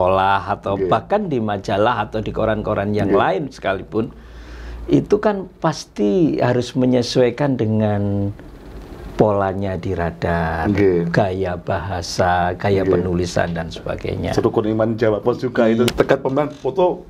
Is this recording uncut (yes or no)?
no